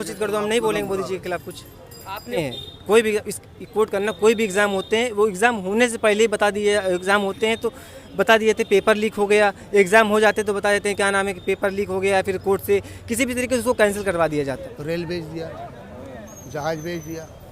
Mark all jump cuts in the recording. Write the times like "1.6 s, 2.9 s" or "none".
2.3 s, 14.7 s